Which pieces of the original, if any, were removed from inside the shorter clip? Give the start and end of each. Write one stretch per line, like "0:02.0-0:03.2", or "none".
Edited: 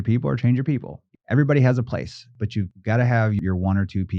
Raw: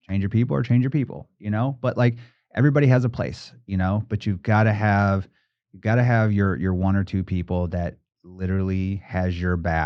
0:01.3-0:02.3
0:03.6-0:05.3
0:06.4-0:06.6